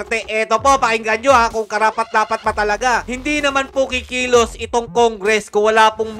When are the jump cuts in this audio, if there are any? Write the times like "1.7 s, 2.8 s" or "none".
3.1 s